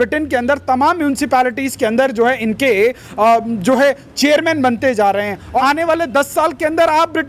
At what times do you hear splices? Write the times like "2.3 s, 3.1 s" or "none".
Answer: 5.6 s